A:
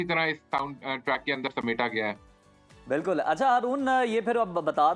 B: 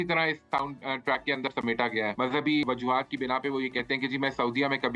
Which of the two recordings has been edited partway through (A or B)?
B